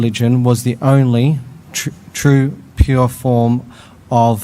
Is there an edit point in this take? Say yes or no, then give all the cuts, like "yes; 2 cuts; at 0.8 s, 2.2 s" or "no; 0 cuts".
no; 0 cuts